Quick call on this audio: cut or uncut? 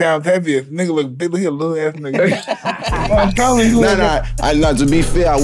uncut